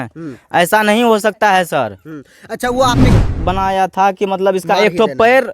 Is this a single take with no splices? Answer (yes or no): no